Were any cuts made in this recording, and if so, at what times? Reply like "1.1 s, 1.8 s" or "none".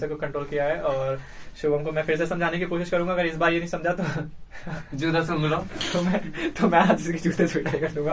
none